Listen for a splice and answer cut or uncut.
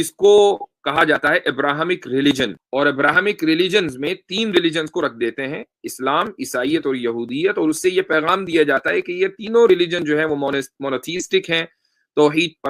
cut